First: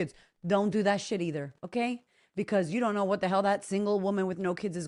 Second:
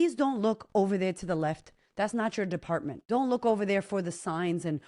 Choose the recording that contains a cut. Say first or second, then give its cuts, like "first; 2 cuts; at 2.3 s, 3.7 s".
second; 1 cut; at 3.0 s